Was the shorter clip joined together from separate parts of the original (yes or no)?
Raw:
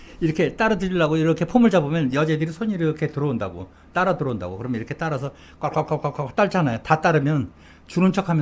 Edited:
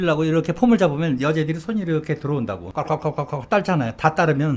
yes